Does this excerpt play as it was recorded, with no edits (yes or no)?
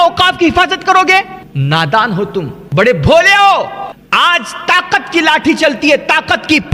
no